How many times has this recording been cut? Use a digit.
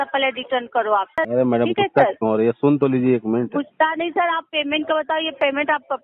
1